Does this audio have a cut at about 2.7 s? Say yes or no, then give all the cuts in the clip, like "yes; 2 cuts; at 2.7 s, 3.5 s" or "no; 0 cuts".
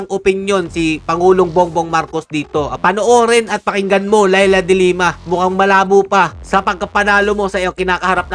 yes; 1 cut; at 2.7 s